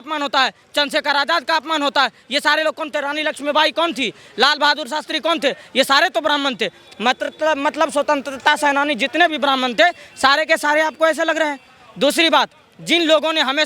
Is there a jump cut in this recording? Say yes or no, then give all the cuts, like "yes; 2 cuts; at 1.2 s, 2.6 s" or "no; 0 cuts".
no; 0 cuts